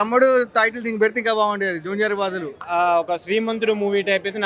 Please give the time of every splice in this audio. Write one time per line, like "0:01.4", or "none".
0:02.6